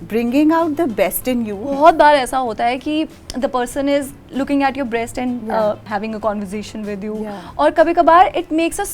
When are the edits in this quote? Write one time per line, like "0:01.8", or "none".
0:01.7
0:05.8

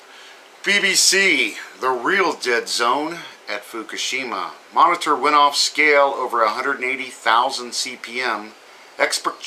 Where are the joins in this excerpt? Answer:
none

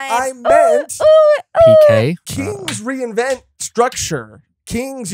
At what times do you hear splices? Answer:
0:02.2

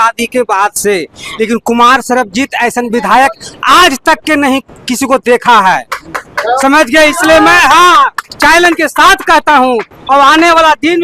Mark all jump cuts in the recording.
none

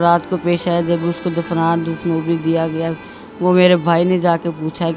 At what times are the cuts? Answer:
none

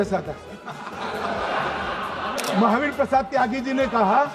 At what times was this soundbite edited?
0:02.4

